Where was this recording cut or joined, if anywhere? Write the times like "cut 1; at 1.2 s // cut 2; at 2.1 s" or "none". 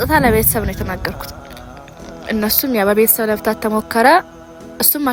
none